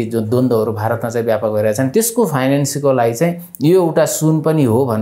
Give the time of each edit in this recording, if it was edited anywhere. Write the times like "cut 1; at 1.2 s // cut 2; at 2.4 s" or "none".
cut 1; at 1.9 s

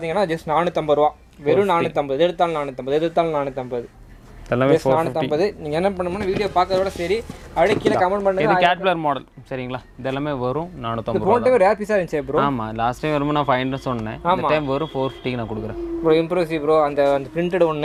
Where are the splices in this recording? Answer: none

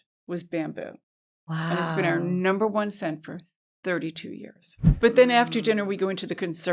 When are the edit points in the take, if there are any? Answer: cut 1; at 4.9 s

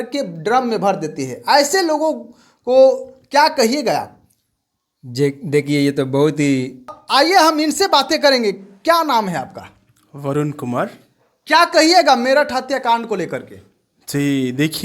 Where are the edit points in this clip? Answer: cut 1; at 7.0 s

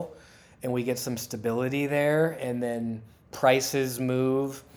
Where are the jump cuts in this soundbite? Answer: none

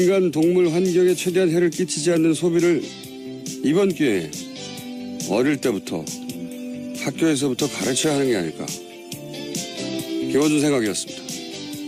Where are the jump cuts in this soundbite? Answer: none

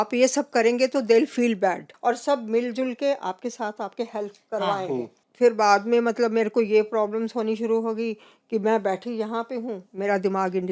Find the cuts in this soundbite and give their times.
cut 1; at 1.9 s // cut 2; at 5.2 s

